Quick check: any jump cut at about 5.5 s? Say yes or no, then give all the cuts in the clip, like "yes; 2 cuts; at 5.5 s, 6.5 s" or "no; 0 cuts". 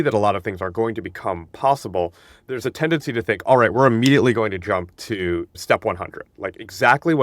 yes; 1 cut; at 5.5 s